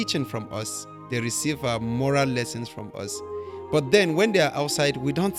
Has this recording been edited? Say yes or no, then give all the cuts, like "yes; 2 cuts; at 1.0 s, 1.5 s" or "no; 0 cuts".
no; 0 cuts